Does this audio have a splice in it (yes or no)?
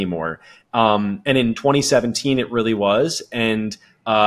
no